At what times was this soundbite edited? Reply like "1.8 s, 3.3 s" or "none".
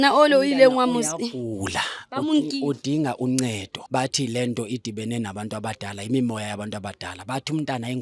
3.7 s